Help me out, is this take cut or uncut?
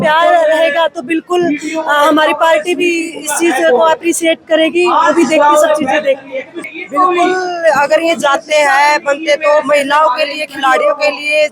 cut